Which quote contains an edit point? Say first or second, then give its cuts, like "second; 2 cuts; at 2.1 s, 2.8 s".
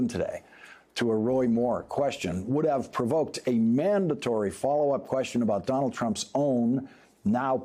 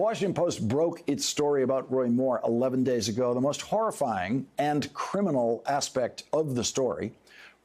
second; 1 cut; at 4.9 s